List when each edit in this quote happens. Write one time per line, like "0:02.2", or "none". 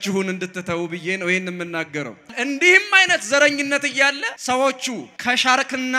0:02.4
0:04.3
0:05.0